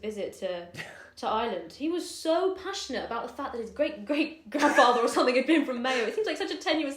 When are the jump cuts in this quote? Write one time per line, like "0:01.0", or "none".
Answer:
none